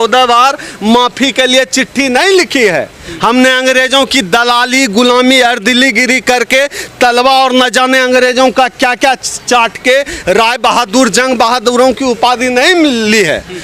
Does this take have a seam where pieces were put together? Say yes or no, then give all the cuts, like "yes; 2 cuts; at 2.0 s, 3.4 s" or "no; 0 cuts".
no; 0 cuts